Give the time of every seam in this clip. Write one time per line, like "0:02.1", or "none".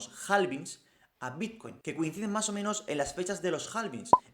0:01.7